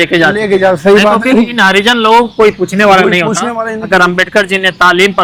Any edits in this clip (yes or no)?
no